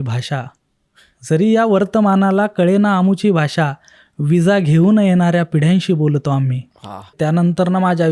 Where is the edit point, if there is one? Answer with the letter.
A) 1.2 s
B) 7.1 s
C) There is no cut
B